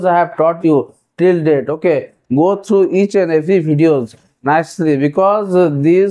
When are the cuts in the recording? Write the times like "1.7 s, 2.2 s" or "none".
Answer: none